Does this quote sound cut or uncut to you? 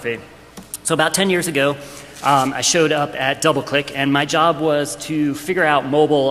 cut